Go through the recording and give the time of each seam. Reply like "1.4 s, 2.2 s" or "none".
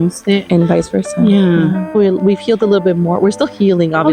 1.9 s